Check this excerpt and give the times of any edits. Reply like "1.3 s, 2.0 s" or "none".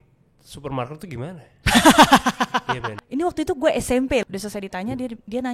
2.9 s, 4.2 s